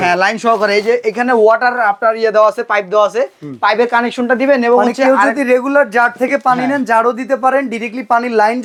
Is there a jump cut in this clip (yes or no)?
no